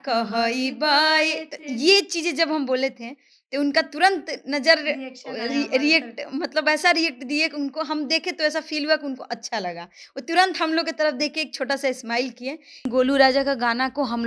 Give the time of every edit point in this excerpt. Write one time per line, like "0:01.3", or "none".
0:12.9